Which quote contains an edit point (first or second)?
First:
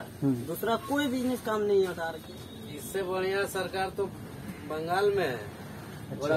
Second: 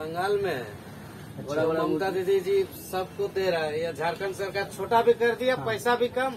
first